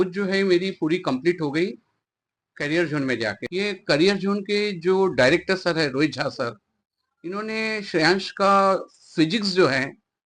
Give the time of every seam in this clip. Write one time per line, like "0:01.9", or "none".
0:03.4